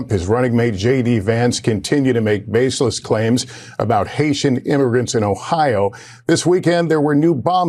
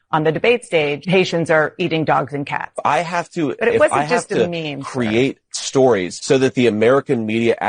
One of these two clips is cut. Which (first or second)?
second